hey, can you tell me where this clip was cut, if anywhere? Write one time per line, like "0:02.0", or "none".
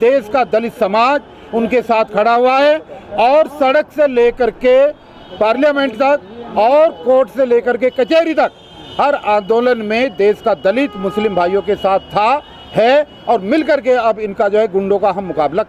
none